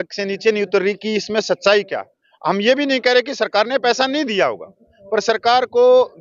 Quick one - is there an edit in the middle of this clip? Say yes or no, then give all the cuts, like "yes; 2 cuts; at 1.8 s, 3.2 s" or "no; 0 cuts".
no; 0 cuts